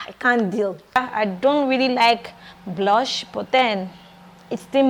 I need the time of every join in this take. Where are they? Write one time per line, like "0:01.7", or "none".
0:01.0